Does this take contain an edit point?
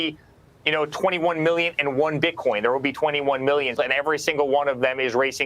yes; 1 cut; at 3.8 s

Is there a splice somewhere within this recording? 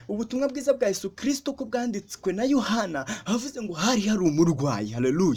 no; 0 cuts

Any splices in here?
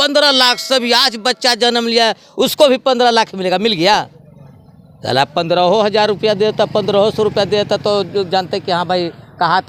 no; 0 cuts

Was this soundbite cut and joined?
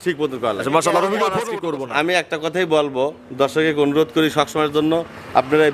yes; 1 cut; at 1.3 s

